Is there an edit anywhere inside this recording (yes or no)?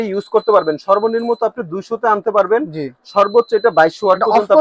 no